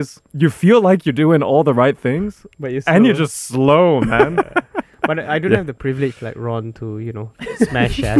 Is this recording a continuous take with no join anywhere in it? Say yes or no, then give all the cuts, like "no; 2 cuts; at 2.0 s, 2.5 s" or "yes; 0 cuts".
yes; 0 cuts